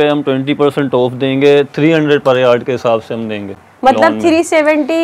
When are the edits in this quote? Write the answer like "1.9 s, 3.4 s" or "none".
none